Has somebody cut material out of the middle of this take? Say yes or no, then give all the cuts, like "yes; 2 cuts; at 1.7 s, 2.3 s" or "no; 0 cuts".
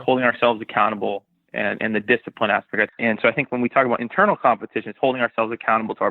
yes; 1 cut; at 2.8 s